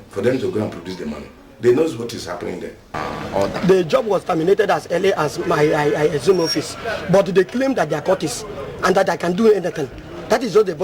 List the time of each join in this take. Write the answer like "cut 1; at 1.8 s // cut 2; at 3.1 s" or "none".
cut 1; at 2.9 s